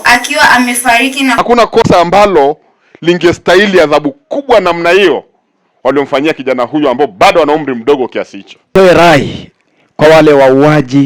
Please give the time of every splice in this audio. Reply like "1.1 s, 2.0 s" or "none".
1.3 s, 8.7 s